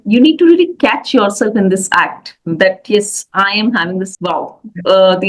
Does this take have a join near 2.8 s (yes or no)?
no